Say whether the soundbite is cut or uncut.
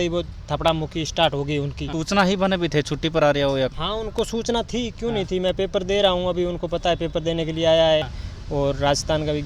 cut